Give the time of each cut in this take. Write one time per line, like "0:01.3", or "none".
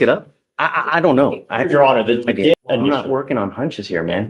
0:02.6